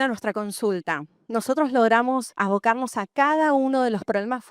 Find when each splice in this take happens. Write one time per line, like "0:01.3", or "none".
0:02.3